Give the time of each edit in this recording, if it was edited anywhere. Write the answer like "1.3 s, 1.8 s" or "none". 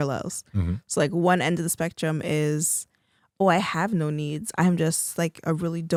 none